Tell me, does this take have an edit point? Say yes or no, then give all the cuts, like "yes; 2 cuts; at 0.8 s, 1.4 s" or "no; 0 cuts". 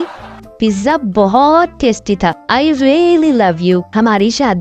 no; 0 cuts